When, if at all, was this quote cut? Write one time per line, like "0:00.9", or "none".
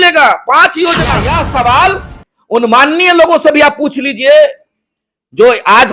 0:01.2